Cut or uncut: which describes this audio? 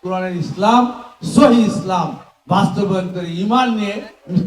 uncut